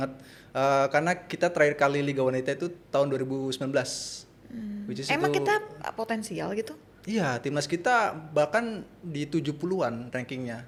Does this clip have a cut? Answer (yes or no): no